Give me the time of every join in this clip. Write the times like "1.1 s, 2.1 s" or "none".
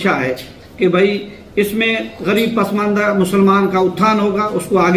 none